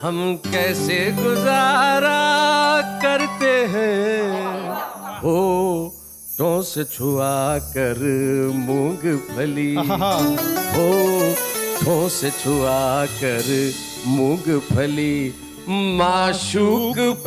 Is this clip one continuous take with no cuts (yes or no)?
yes